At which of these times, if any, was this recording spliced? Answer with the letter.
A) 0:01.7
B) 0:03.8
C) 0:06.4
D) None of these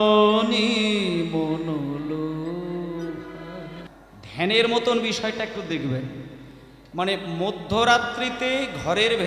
B